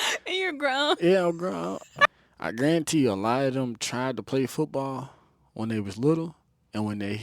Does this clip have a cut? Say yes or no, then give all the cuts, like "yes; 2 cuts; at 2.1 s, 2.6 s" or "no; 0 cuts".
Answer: yes; 1 cut; at 2.1 s